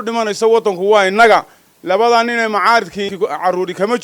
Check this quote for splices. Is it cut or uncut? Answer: cut